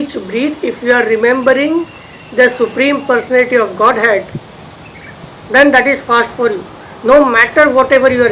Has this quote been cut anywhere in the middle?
no; 0 cuts

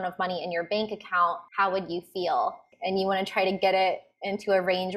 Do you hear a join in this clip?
yes; 2 cuts; at 1.4 s, 2.7 s

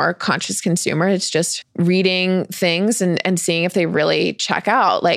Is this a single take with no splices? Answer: no; 1 cut; at 1.6 s

